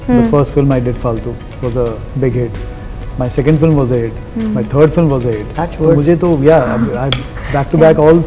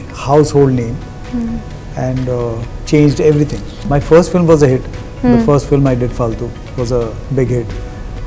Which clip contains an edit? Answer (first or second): second